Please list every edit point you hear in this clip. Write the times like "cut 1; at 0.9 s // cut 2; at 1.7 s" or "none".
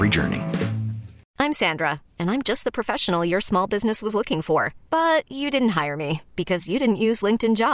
cut 1; at 1.2 s